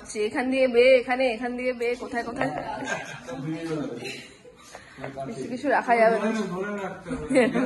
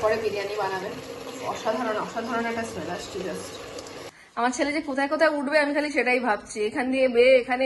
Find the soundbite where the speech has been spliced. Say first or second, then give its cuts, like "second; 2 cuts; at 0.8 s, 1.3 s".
second; 1 cut; at 4.1 s